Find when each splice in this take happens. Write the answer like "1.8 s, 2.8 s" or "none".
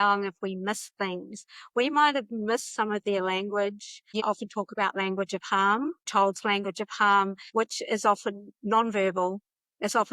4.1 s, 6.0 s, 7.4 s